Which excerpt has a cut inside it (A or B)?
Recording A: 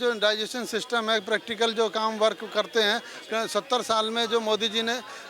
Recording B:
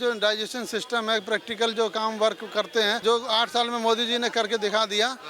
B